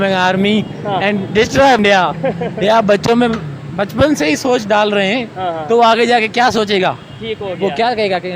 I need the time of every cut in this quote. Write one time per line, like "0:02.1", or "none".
0:01.8